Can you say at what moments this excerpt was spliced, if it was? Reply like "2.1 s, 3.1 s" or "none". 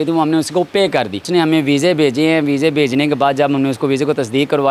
1.2 s